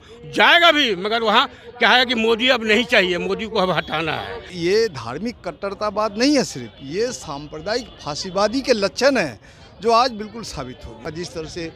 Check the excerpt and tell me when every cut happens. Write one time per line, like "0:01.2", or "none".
0:04.5
0:11.1